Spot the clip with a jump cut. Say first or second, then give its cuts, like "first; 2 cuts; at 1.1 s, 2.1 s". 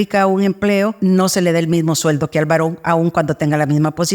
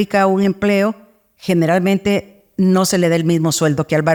first; 1 cut; at 0.9 s